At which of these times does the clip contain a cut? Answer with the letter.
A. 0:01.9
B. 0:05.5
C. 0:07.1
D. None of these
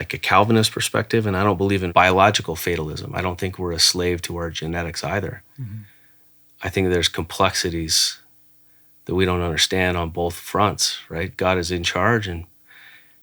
A